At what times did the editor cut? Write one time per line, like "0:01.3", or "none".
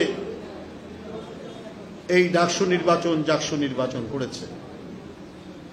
none